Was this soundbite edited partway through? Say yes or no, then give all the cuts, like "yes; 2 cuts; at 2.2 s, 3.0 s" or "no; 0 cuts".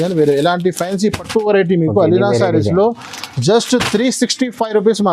no; 0 cuts